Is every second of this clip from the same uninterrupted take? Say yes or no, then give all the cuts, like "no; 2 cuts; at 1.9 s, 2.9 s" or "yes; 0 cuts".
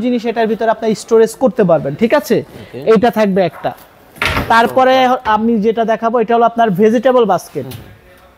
yes; 0 cuts